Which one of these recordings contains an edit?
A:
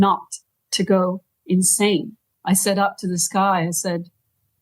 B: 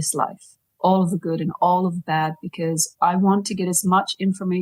A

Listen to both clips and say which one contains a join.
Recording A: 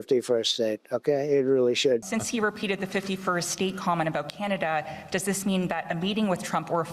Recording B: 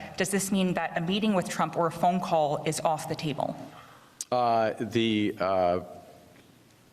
A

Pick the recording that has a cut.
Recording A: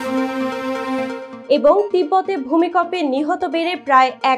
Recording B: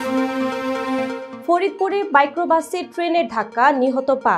A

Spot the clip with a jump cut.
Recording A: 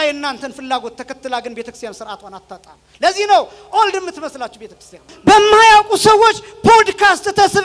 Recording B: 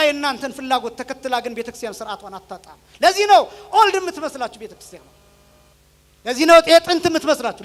A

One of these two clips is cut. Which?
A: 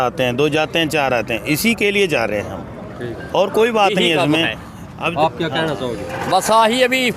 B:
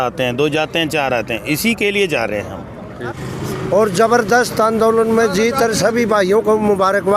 B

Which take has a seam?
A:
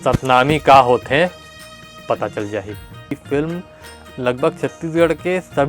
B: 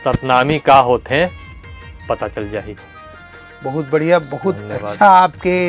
A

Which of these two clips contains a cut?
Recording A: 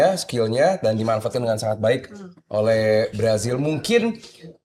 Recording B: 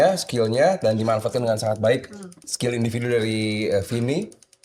B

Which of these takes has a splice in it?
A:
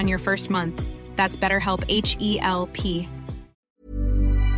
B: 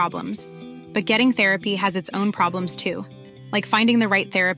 A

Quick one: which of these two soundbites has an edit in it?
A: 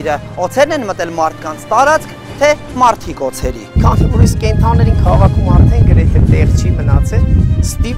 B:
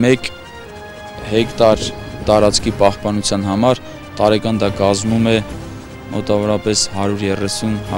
A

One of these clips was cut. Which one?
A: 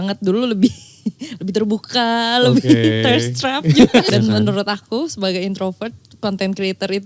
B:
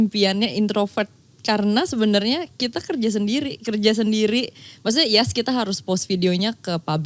A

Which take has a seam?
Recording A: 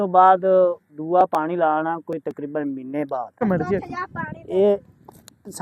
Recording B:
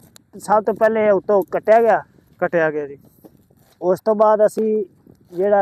A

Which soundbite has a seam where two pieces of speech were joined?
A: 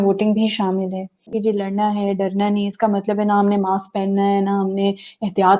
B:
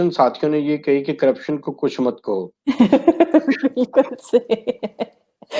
A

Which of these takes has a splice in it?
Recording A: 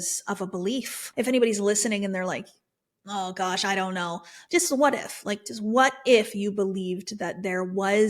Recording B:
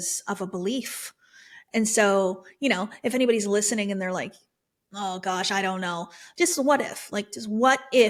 A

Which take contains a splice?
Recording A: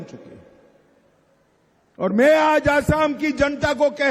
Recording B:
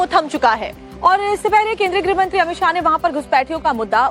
A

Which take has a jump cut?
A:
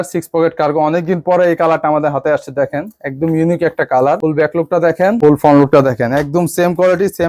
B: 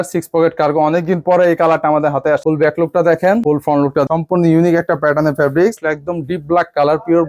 B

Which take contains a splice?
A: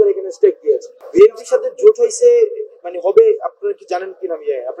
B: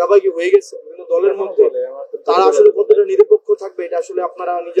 A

